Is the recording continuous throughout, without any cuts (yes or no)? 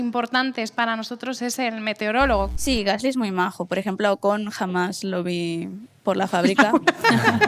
no